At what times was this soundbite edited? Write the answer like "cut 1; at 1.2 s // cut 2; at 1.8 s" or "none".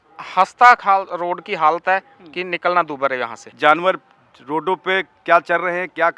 cut 1; at 3.4 s